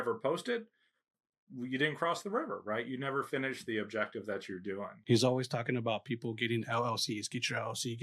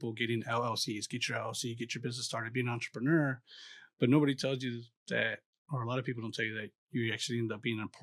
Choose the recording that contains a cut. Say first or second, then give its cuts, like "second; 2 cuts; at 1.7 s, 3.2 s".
first; 2 cuts; at 1.4 s, 4.9 s